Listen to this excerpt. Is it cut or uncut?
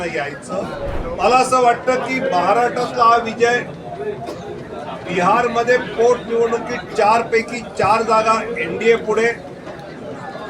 cut